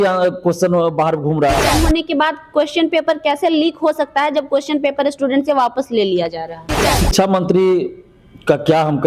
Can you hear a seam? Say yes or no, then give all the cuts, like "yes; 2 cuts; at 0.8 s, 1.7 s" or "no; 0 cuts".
yes; 2 cuts; at 1.7 s, 7.0 s